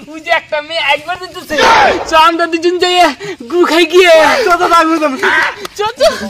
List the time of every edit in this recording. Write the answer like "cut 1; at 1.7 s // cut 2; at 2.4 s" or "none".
none